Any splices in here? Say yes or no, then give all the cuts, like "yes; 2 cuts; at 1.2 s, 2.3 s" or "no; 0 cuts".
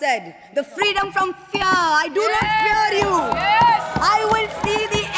no; 0 cuts